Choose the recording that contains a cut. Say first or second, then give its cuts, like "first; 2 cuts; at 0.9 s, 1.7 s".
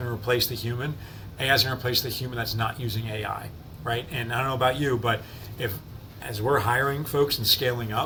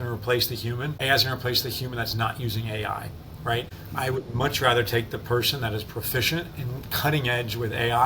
second; 2 cuts; at 0.9 s, 3.8 s